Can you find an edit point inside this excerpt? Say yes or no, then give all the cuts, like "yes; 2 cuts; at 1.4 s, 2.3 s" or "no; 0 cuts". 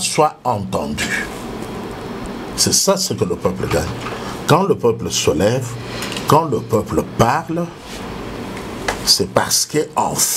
no; 0 cuts